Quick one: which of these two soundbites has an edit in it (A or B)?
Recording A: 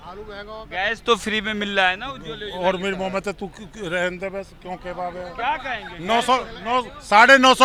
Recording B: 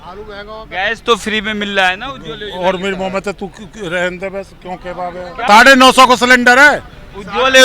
B